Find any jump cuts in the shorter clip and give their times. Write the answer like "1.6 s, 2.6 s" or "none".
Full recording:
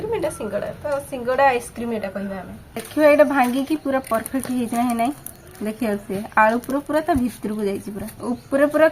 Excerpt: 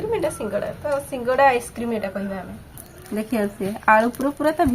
2.8 s